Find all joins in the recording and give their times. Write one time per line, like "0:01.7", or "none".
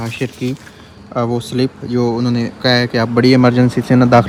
none